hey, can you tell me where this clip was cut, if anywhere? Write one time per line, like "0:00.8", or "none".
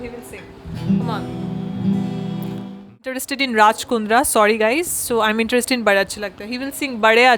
0:03.2

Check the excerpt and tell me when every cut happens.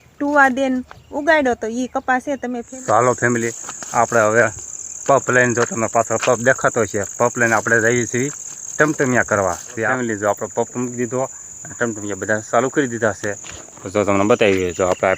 0:02.7
0:09.9

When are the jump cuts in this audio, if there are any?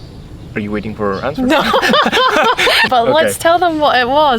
0:02.9

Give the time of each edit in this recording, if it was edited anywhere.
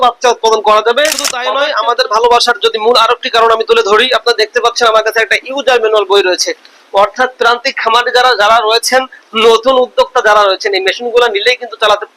0:01.4

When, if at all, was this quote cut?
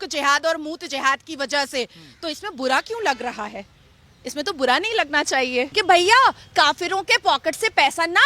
0:05.7

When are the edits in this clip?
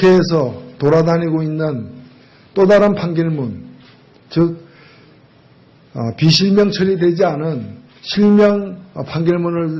0:06.1

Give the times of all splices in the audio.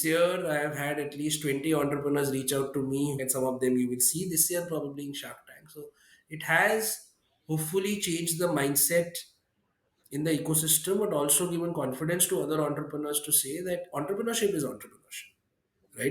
0:03.2

